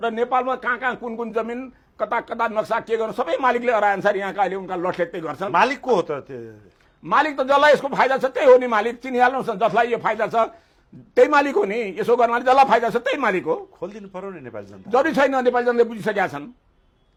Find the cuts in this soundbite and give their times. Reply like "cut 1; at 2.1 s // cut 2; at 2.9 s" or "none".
none